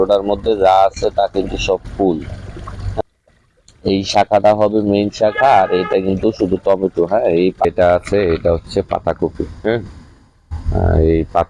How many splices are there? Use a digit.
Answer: 2